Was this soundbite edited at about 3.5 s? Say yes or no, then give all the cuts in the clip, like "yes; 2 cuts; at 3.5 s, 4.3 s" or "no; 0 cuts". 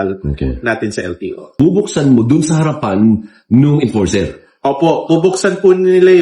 no; 1 cut; at 1.6 s